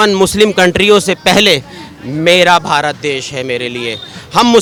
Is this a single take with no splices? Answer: yes; 0 cuts

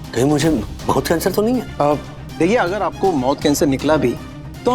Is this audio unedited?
no; 1 cut; at 1.7 s

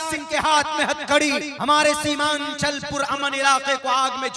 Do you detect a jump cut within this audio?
yes; 1 cut; at 1.5 s

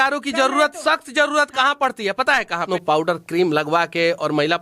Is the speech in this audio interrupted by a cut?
yes; 1 cut; at 2.6 s

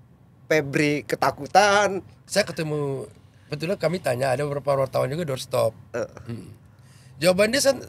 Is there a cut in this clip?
yes; 1 cut; at 2.2 s

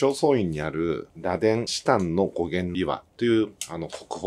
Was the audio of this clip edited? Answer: no; 0 cuts

